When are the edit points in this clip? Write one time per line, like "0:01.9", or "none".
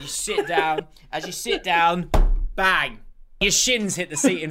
0:03.5

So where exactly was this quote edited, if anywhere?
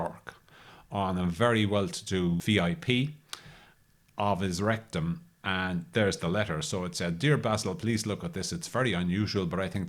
0:02.4

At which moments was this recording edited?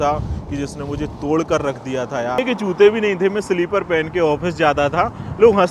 0:02.4

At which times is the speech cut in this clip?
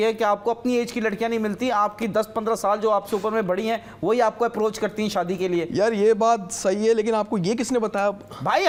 none

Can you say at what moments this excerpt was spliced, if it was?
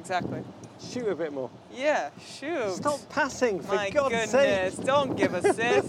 none

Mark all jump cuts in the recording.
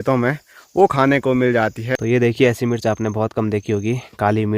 0:01.9

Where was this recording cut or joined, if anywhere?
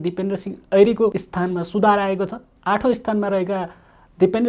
0:01.2

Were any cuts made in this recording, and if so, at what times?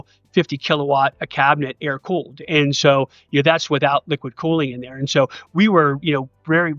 none

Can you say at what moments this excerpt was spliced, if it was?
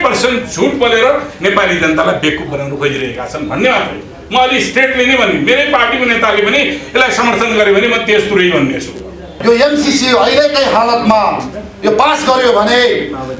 0:09.4

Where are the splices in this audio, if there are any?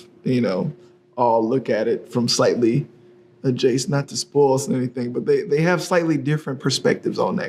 none

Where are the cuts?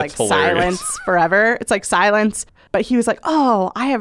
0:02.5

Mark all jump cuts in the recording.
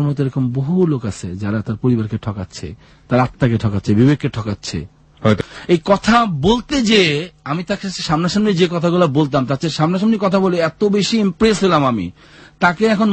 0:05.4

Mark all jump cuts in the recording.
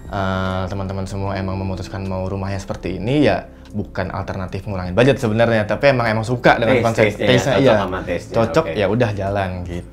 none

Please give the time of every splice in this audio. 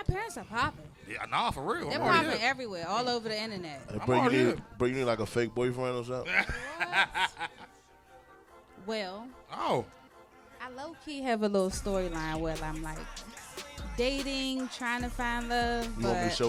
none

